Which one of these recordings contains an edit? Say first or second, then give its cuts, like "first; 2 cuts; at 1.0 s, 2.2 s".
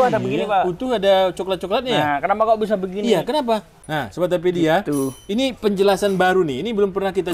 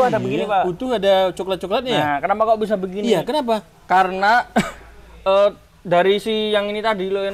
first; 1 cut; at 3.7 s